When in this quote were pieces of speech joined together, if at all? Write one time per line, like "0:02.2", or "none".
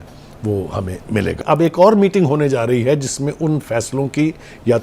0:01.4